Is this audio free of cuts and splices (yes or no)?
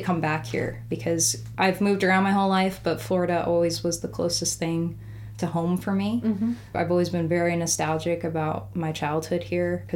yes